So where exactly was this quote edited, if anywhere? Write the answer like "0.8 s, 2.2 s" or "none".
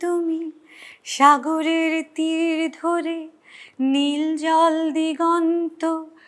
none